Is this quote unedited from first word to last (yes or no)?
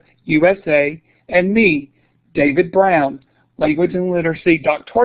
yes